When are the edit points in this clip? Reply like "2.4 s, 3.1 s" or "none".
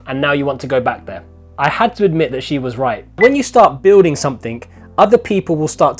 3.2 s